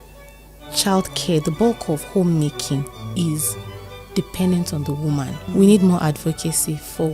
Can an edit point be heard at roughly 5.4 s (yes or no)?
yes